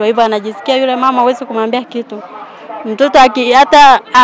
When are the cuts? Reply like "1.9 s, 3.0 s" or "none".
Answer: none

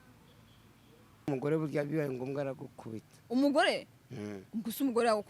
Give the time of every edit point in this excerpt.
1.3 s

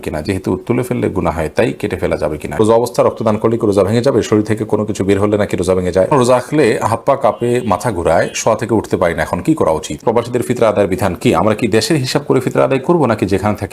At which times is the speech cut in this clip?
2.6 s, 6.1 s, 10.0 s

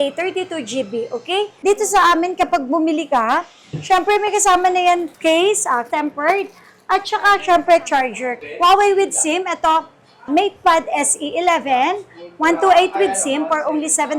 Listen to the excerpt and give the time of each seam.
1.5 s, 5.1 s, 5.9 s, 8.4 s

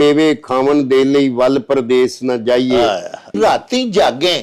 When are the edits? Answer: 3.3 s

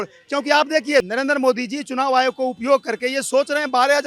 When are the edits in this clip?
1.1 s

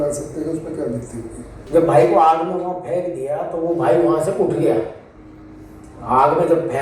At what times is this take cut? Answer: 1.5 s

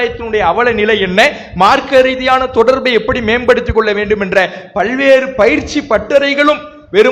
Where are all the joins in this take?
none

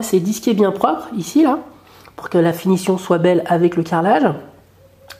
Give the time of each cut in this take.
none

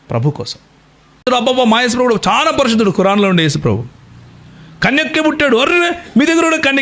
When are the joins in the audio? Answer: 1.3 s

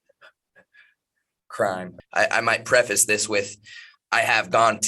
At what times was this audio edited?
2.0 s

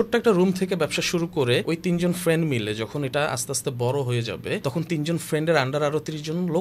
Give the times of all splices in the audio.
1.6 s, 4.6 s

